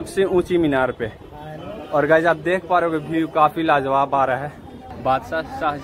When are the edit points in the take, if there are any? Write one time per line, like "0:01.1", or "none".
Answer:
0:04.9